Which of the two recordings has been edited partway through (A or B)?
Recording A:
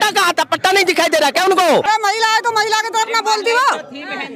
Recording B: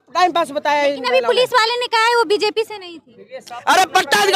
A